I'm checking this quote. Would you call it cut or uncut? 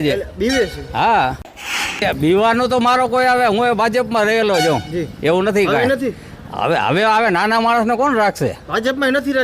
cut